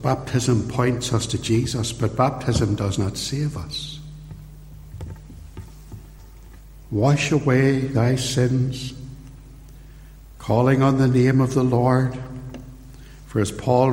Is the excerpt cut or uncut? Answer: cut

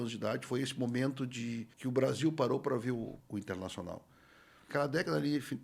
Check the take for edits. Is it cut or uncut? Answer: cut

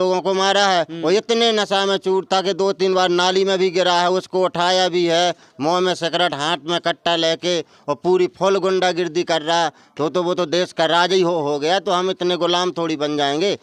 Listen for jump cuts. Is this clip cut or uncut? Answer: uncut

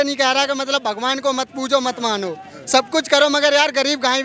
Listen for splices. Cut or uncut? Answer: uncut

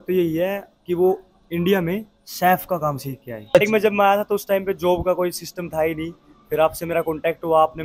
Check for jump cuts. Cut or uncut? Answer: cut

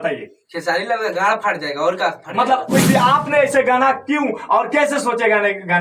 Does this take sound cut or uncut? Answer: cut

